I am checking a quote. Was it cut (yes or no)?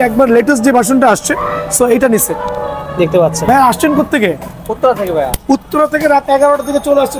no